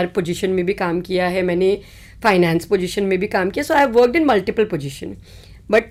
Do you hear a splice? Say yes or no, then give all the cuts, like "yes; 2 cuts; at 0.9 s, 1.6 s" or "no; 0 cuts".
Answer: no; 0 cuts